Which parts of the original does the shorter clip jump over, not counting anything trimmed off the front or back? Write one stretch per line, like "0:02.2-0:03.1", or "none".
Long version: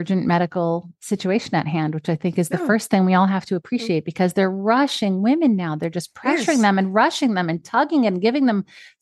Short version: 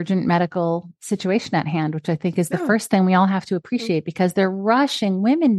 none